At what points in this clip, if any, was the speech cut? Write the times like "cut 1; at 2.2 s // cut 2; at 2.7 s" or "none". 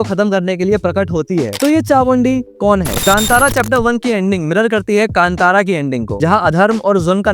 cut 1; at 1.5 s // cut 2; at 2.9 s